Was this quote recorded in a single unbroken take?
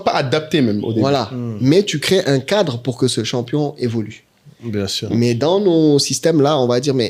yes; 0 cuts

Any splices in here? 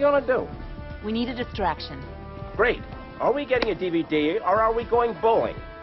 no; 0 cuts

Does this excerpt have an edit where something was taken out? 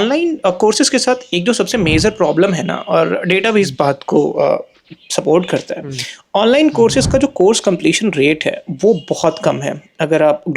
no; 0 cuts

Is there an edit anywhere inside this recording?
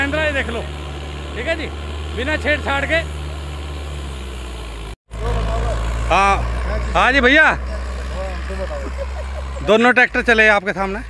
yes; 1 cut; at 4.9 s

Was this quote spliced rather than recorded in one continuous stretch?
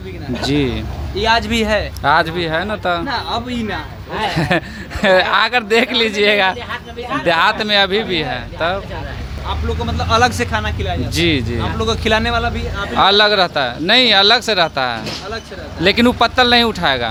no; 0 cuts

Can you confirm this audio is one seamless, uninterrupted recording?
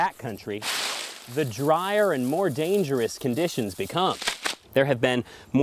no; 1 cut; at 4.6 s

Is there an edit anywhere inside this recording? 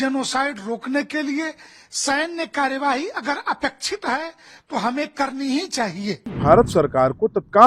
yes; 1 cut; at 6.3 s

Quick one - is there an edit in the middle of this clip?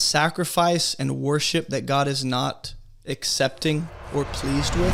no; 0 cuts

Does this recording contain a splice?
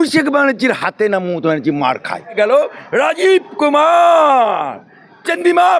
yes; 1 cut; at 2.3 s

